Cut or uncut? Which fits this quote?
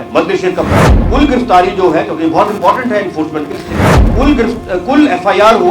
cut